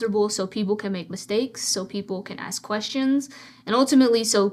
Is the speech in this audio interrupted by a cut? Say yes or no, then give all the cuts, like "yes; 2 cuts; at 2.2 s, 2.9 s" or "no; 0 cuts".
no; 0 cuts